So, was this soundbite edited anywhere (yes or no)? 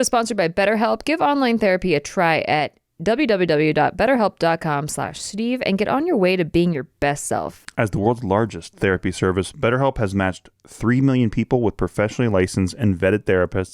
yes